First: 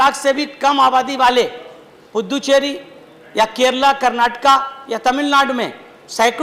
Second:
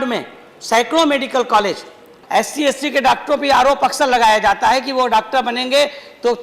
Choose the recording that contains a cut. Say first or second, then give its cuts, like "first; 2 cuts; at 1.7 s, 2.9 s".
second; 1 cut; at 2.1 s